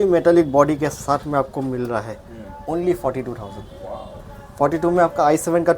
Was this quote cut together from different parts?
no; 0 cuts

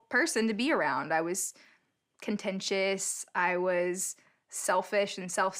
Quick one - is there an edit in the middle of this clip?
no; 0 cuts

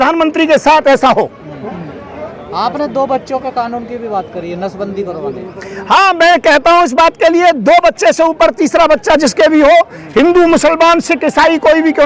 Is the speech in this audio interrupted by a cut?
no; 0 cuts

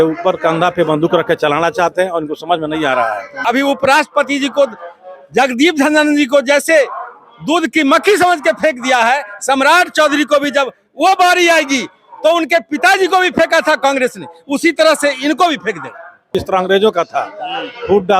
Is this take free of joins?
no; 2 cuts; at 3.4 s, 16.3 s

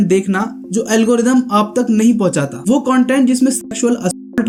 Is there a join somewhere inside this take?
no; 0 cuts

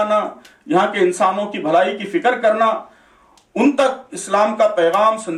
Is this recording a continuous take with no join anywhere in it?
yes; 0 cuts

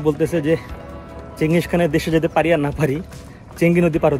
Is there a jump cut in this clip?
no; 0 cuts

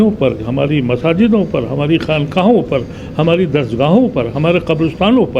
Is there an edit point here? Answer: no; 0 cuts

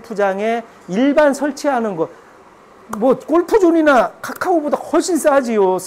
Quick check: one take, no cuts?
yes; 0 cuts

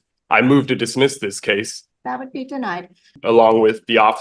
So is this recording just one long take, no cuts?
no; 2 cuts; at 1.8 s, 3.2 s

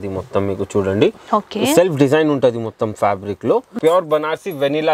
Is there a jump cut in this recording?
yes; 1 cut; at 3.7 s

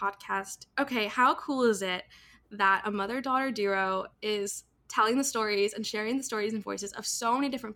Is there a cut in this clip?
no; 0 cuts

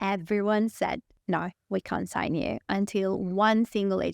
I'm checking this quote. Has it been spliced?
yes; 1 cut; at 1.1 s

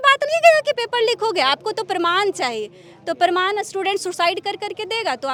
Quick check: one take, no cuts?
yes; 0 cuts

